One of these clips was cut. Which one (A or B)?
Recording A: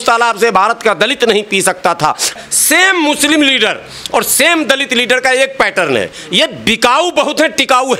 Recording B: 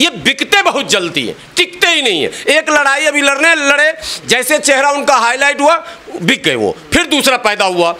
A